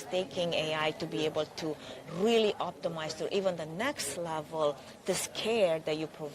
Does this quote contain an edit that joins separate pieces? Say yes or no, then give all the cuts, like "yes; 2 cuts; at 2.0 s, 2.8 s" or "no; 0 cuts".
no; 0 cuts